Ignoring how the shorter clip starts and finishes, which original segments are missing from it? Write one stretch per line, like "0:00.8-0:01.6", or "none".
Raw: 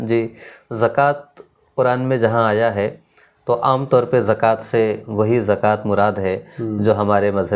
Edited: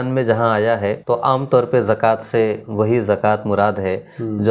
0:02.9-0:03.4